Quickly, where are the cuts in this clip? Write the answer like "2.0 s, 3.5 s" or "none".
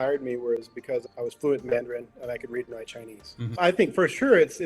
1.0 s, 3.6 s